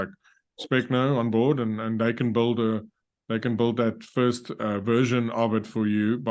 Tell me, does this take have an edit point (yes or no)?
no